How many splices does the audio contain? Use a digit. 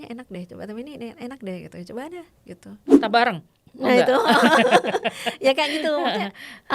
1